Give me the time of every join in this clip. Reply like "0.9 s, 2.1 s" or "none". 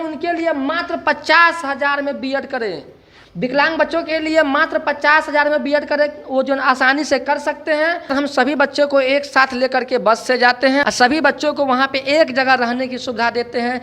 8.1 s, 10.8 s